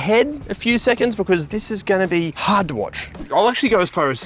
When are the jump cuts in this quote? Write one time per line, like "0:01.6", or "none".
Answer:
0:02.9